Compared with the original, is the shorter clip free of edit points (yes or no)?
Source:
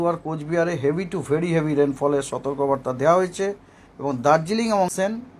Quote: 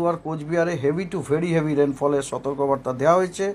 yes